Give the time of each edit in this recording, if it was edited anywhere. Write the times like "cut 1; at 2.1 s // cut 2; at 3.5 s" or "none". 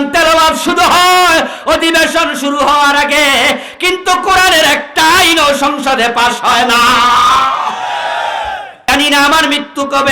cut 1; at 8.7 s